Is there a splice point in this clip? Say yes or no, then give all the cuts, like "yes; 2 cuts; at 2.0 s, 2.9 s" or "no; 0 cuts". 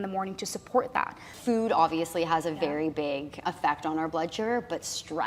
yes; 2 cuts; at 1.3 s, 3.4 s